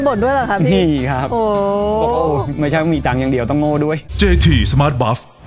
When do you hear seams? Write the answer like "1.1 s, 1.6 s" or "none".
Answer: 4.0 s